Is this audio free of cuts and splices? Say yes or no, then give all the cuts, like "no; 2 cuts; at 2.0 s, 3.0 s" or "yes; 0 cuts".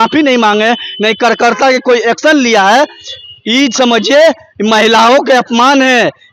yes; 0 cuts